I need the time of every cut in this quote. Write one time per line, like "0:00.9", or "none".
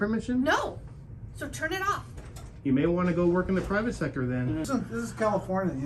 0:04.7